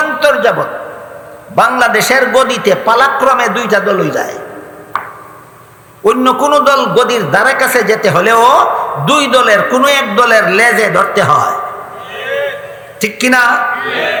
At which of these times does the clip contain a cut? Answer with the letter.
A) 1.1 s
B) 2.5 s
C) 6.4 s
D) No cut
D